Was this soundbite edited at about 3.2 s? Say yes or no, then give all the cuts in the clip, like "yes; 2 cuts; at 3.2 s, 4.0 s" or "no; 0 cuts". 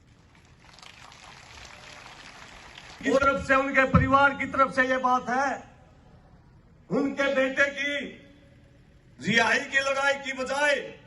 yes; 1 cut; at 3.2 s